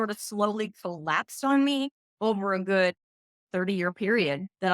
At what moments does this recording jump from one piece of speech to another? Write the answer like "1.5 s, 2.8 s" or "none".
2.0 s, 3.4 s